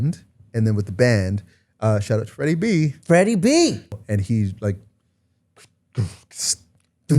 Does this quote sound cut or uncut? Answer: cut